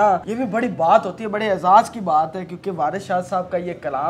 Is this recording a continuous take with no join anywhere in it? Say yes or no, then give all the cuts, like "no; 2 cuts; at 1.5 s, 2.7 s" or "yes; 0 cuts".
yes; 0 cuts